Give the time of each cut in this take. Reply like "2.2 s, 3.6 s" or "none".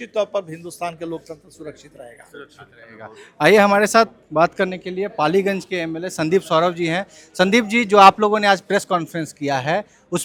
none